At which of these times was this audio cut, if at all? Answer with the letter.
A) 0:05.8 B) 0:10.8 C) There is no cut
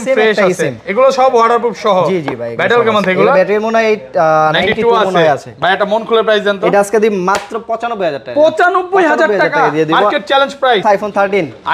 B